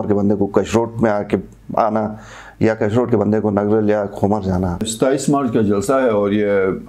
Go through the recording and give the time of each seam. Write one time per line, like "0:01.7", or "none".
0:04.8